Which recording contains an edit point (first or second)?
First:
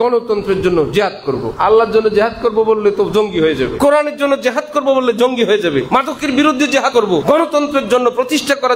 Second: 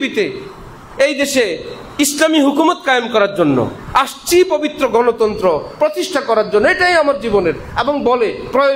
first